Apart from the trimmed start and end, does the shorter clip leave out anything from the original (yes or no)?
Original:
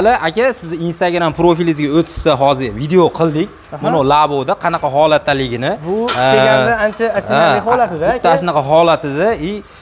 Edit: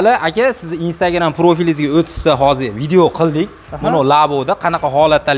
no